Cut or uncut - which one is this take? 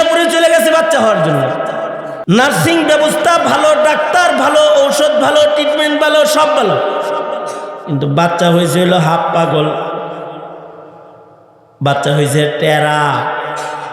cut